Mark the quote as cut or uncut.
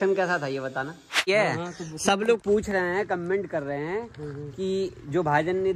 cut